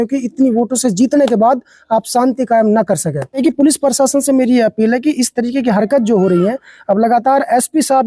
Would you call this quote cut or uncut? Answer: cut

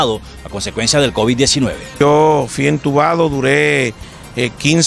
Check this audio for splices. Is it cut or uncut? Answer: cut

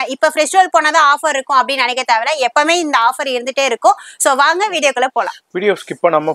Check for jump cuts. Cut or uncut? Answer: uncut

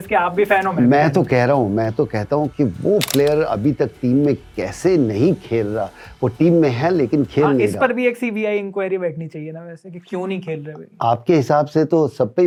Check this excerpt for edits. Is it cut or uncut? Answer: uncut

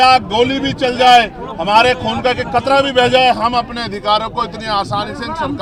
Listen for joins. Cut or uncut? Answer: uncut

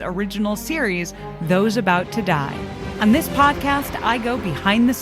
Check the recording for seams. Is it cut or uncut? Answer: cut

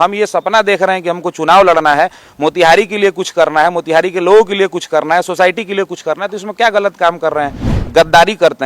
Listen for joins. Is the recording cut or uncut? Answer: cut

